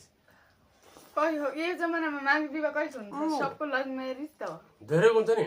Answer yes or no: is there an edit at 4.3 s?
no